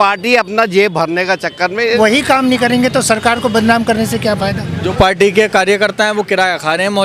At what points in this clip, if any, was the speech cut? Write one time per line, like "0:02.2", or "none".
0:02.0
0:04.9